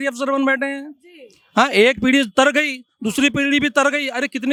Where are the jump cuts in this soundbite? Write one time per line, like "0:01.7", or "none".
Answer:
none